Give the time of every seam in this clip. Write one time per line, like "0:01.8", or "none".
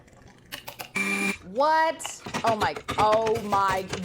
0:02.3

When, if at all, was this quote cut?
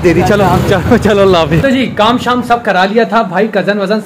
none

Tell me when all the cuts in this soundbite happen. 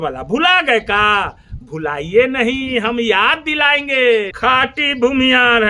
0:04.3

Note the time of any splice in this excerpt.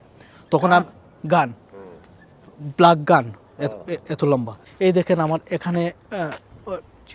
0:04.6

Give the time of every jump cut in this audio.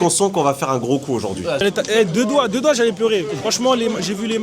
0:01.6

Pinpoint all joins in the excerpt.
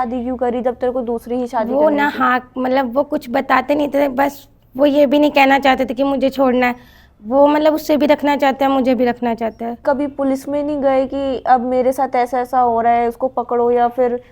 0:09.8

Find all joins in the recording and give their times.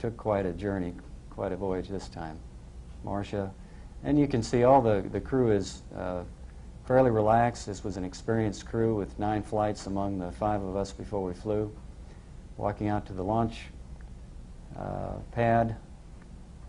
0:13.4

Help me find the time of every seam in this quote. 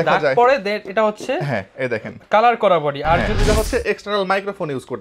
0:03.4

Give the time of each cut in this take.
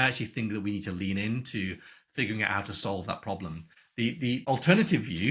0:04.0

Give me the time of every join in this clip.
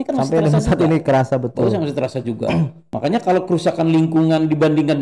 0:02.8

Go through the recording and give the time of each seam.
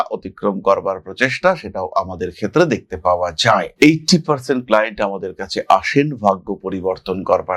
none

